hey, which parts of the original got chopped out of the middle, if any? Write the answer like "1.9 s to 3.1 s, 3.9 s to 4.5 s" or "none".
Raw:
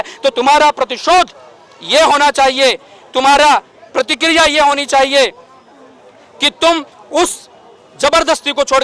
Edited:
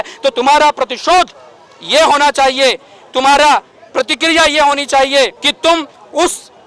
5.4 s to 6.4 s